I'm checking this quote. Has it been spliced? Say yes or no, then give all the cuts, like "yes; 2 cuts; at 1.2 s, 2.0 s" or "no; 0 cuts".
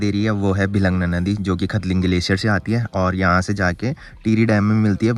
no; 0 cuts